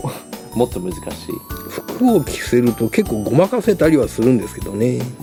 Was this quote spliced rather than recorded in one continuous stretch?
no; 0 cuts

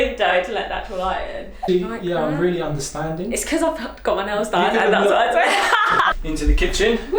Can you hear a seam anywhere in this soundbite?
yes; 2 cuts; at 1.7 s, 6.1 s

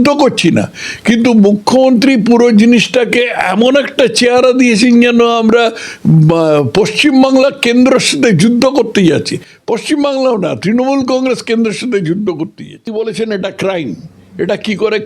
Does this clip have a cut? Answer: yes; 1 cut; at 12.9 s

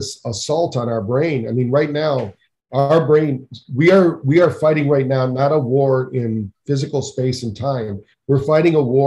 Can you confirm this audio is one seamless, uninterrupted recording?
yes; 0 cuts

